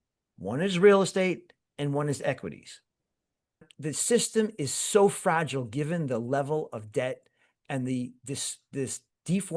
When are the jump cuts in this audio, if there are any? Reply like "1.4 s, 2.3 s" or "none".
3.7 s